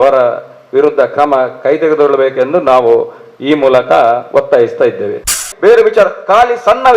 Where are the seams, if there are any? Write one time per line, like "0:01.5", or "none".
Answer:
0:05.5